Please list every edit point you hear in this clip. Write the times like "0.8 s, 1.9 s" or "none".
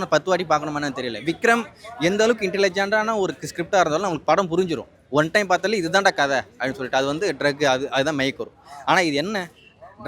none